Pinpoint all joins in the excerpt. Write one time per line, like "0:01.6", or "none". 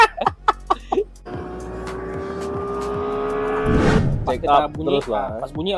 0:04.0